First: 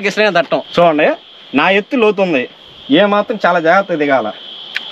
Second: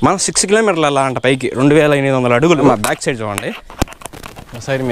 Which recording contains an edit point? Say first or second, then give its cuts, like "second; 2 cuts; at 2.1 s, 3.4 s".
second; 1 cut; at 2.6 s